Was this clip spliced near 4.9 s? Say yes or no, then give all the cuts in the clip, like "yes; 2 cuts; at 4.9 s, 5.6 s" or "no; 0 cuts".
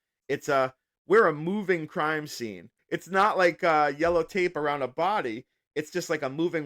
no; 1 cut; at 2.7 s